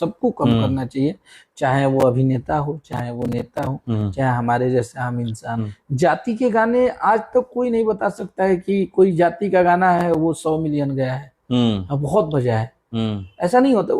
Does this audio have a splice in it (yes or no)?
yes